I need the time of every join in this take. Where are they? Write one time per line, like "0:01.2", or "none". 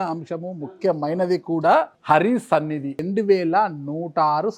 0:01.9
0:03.0